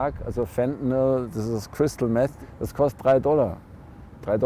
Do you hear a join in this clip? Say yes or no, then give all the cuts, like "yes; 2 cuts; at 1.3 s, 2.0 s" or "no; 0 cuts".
yes; 1 cut; at 2.4 s